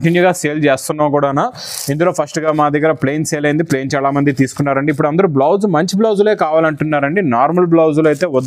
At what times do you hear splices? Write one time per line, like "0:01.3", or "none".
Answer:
none